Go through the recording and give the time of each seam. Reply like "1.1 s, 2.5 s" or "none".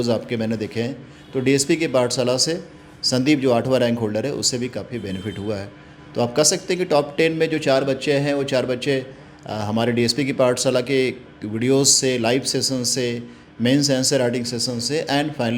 none